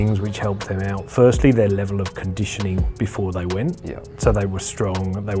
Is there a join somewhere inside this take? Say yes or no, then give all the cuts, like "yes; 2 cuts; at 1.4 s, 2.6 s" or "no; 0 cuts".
no; 0 cuts